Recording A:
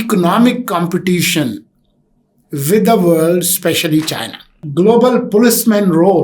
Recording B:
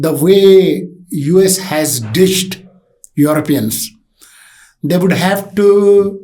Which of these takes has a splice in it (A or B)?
A